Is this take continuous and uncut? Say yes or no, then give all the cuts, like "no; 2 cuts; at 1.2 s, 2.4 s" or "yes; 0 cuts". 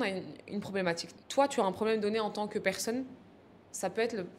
no; 1 cut; at 1.1 s